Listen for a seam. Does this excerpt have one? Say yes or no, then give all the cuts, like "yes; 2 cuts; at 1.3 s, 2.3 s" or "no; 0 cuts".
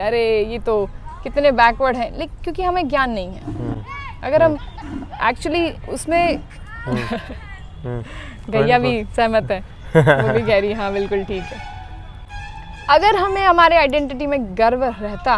no; 0 cuts